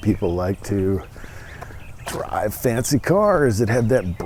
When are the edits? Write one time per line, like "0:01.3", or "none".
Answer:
none